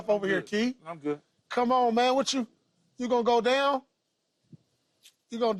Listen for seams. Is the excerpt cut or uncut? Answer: uncut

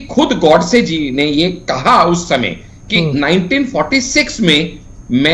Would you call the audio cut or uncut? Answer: uncut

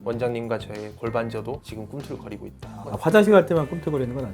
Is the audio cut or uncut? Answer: cut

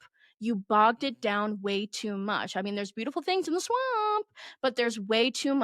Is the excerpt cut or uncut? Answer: uncut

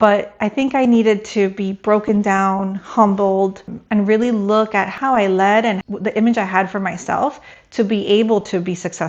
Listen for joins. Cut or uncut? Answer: cut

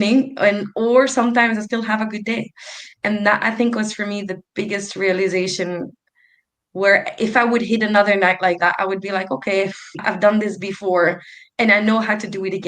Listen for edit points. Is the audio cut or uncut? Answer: cut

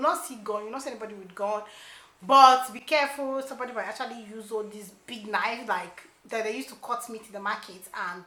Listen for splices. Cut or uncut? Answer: uncut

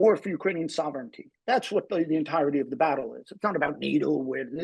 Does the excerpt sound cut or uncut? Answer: uncut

